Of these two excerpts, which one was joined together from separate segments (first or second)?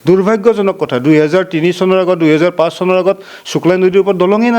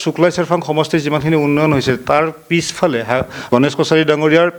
second